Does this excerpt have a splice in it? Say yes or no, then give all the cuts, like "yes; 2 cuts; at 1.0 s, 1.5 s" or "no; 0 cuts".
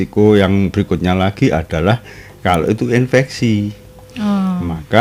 no; 0 cuts